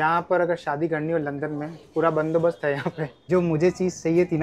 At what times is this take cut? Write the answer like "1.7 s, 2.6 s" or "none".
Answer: 3.1 s